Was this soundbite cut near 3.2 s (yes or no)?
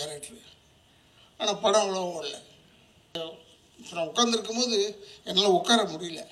yes